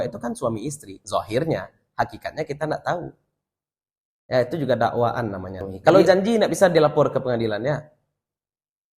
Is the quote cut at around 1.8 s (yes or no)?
no